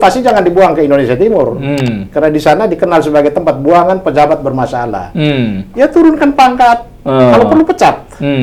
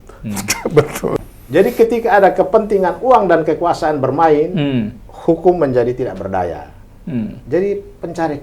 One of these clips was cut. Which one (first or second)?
second